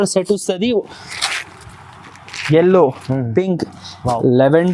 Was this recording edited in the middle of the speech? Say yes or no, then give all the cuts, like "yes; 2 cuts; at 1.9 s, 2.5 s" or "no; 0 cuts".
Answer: no; 0 cuts